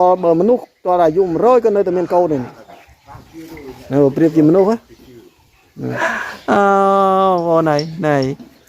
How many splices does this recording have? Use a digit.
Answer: 1